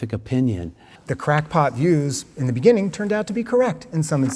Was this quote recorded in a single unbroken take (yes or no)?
no